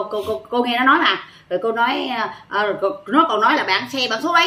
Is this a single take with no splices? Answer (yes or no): yes